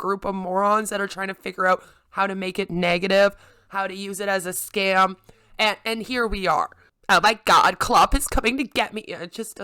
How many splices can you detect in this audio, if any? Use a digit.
1